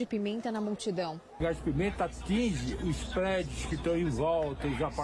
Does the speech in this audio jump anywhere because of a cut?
yes; 1 cut; at 1.2 s

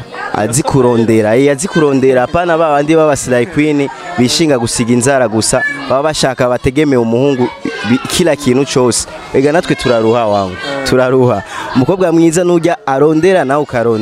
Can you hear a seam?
no; 0 cuts

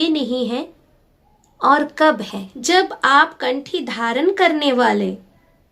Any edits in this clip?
yes; 1 cut; at 2.5 s

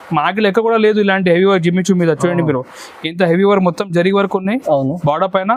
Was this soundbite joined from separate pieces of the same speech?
no; 0 cuts

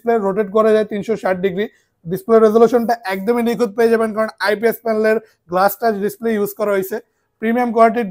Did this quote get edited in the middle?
no; 0 cuts

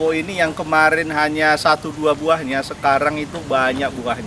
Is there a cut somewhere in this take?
no; 0 cuts

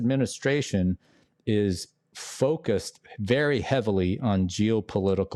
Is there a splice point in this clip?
no; 0 cuts

